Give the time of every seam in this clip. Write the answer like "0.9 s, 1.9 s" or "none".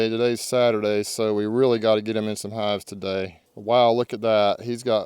none